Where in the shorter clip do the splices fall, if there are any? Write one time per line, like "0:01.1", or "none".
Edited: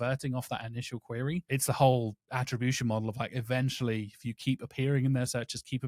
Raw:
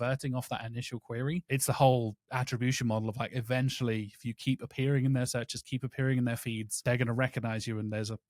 none